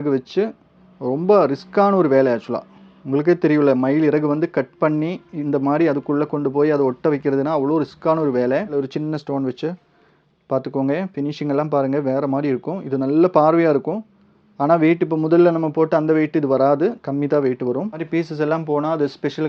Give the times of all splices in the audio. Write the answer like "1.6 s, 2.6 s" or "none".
8.8 s, 18.0 s